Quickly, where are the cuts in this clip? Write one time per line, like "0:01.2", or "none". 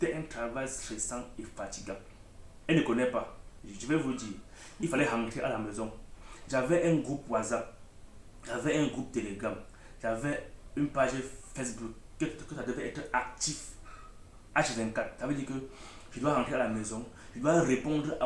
none